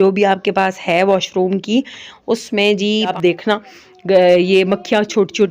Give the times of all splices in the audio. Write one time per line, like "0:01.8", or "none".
0:03.1